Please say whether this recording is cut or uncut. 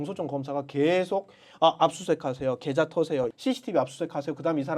cut